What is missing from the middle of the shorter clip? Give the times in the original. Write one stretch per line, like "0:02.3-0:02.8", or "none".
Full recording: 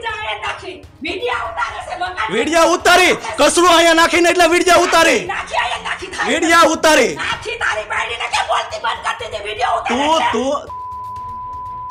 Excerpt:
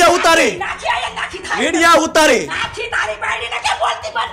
none